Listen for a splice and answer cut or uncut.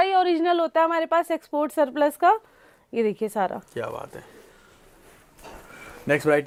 uncut